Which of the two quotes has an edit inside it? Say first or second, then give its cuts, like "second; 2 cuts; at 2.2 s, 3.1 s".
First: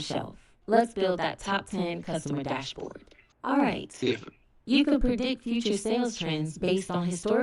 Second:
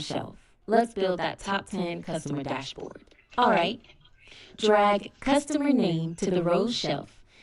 first; 1 cut; at 3.1 s